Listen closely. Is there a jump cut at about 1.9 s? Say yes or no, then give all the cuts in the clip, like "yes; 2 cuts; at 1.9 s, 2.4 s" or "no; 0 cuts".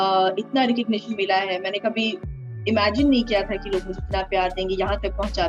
no; 0 cuts